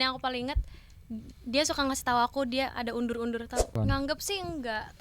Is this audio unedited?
no; 1 cut; at 3.7 s

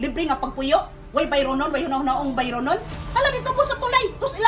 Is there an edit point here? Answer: no; 0 cuts

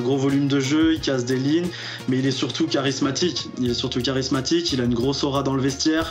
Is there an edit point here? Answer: no; 0 cuts

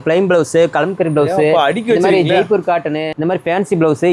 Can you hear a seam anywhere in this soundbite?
no; 0 cuts

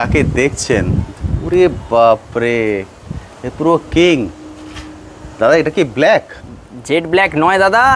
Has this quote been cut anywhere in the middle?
no; 0 cuts

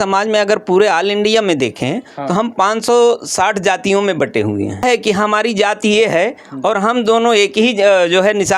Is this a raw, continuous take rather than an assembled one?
no; 1 cut; at 4.8 s

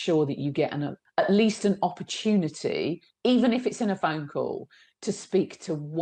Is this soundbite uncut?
no; 1 cut; at 1.0 s

